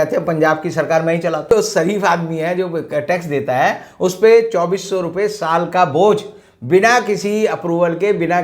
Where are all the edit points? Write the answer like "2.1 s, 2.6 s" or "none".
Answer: 1.5 s